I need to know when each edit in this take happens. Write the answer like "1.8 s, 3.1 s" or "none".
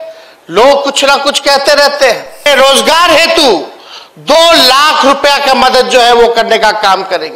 2.5 s